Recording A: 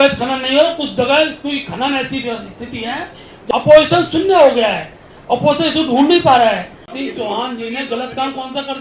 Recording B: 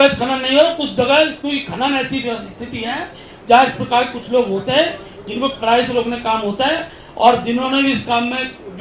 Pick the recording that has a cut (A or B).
A